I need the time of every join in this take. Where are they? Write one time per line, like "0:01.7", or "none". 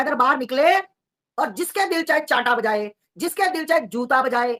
none